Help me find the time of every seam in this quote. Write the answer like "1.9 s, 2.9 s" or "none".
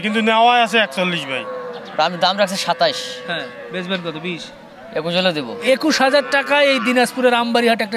1.7 s, 5.5 s